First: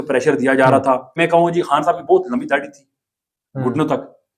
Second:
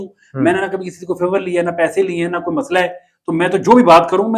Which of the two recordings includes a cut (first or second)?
first